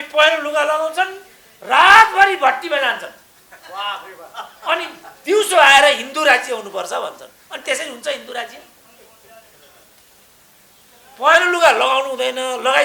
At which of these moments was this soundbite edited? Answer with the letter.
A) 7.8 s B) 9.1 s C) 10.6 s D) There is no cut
D